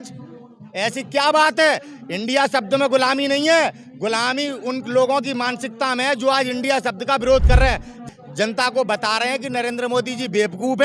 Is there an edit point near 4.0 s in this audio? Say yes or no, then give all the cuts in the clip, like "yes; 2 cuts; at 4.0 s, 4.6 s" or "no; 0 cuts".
no; 1 cut; at 8.0 s